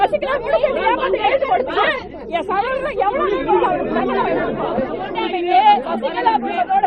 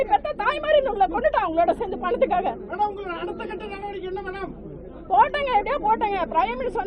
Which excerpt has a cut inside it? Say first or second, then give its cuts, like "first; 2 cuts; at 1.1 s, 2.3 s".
first; 1 cut; at 5.0 s